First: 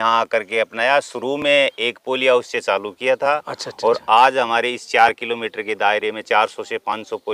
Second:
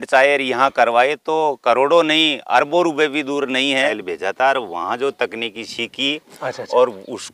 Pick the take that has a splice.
second; 1 cut; at 4.0 s

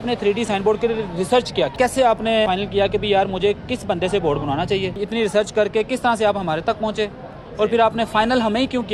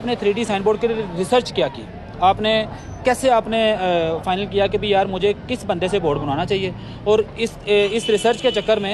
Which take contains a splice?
first; 3 cuts; at 1.7 s, 2.5 s, 5.0 s

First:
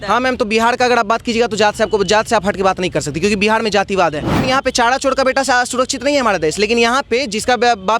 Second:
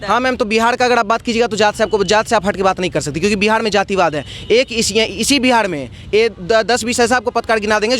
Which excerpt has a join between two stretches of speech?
first; 1 cut; at 4.4 s

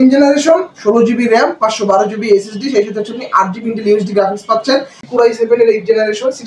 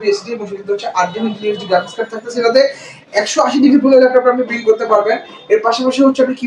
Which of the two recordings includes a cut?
first; 1 cut; at 5.0 s

